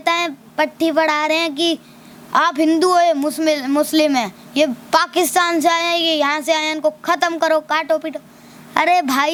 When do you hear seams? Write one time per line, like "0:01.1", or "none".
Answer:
none

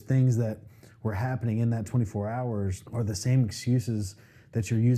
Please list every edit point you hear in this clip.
0:02.8

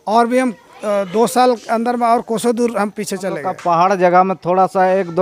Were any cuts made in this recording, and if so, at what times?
0:03.5

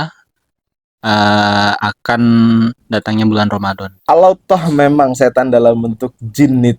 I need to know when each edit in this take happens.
0:03.9

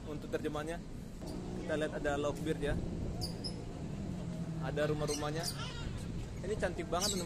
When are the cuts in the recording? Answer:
0:01.2

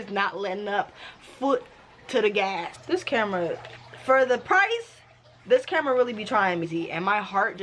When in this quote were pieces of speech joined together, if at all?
0:02.7
0:06.7

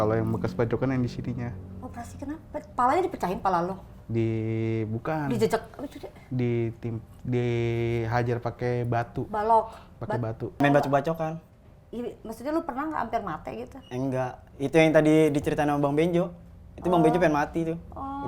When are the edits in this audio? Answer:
none

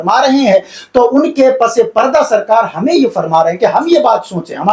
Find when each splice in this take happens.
none

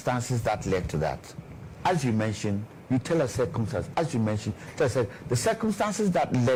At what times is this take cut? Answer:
none

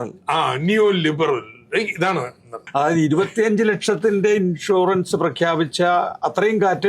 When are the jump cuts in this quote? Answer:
0:02.5

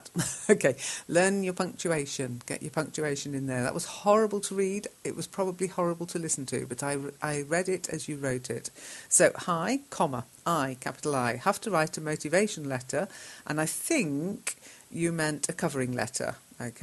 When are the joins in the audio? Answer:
none

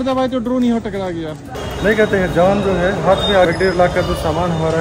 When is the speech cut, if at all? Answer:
0:01.6
0:03.5

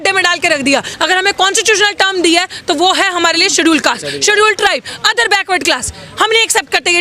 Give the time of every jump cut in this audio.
0:00.9

